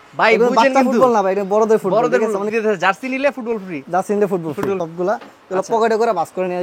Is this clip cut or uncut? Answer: cut